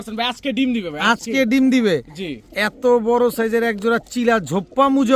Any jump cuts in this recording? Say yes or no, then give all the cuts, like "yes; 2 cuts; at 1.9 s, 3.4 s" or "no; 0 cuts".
no; 0 cuts